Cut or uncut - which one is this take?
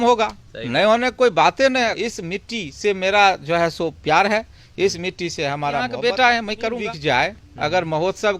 cut